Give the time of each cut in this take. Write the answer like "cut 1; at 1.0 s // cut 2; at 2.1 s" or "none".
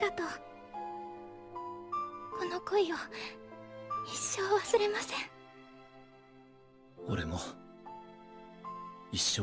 none